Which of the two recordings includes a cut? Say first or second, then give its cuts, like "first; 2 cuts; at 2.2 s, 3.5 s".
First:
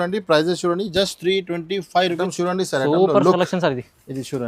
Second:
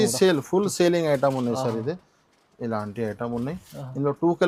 first; 1 cut; at 2.2 s